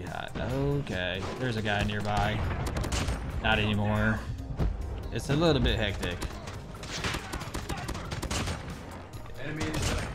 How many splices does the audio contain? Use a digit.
1